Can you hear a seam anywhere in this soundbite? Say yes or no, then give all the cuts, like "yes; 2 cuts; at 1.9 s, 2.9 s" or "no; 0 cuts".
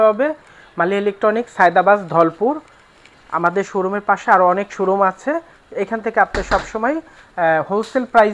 no; 0 cuts